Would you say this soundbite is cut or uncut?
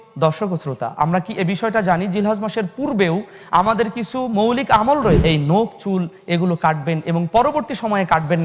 cut